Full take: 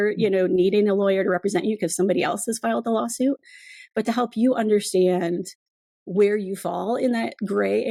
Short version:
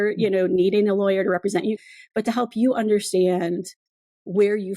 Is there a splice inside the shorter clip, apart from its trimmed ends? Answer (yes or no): yes